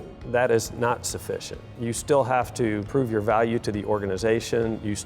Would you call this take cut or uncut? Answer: cut